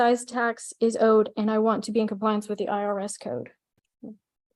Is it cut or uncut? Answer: uncut